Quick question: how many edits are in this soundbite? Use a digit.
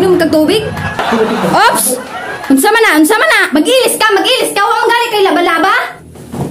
1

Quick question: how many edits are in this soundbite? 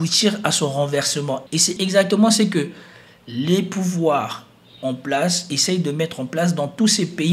1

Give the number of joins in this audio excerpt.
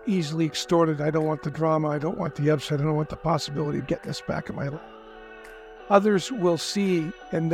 0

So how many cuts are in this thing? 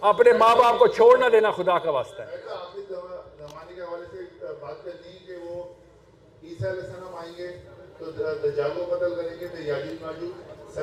0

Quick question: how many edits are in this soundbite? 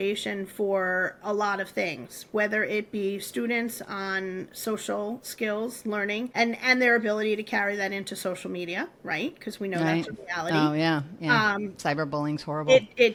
0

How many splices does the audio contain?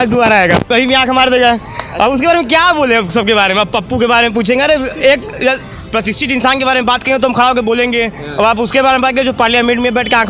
0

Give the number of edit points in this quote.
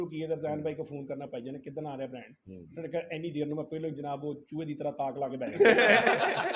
0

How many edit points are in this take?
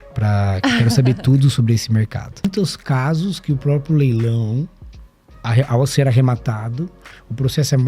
1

